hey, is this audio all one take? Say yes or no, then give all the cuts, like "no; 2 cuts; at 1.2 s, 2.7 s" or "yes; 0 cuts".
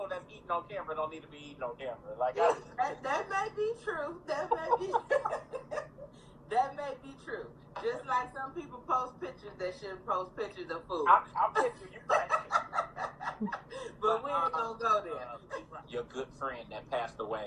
no; 1 cut; at 15.4 s